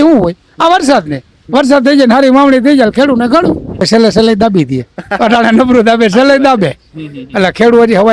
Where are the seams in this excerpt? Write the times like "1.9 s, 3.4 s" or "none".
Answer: 3.9 s